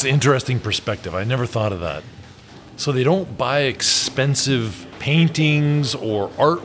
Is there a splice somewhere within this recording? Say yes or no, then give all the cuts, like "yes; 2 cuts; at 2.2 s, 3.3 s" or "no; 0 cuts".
no; 0 cuts